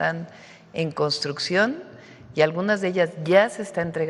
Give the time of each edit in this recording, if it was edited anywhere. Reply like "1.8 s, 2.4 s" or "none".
none